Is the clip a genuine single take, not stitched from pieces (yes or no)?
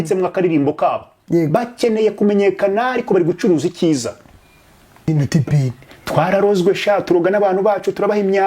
no